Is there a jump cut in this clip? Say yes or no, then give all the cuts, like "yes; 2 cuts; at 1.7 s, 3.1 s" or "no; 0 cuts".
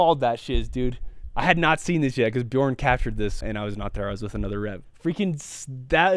yes; 1 cut; at 3.4 s